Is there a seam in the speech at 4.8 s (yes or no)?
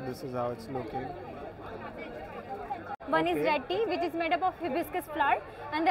no